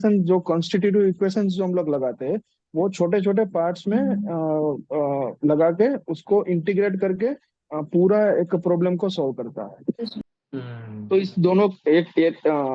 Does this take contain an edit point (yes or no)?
yes